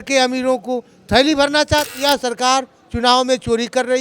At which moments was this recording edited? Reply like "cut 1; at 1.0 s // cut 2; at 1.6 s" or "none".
cut 1; at 1.9 s